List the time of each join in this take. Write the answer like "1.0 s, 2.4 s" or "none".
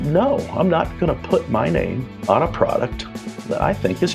2.1 s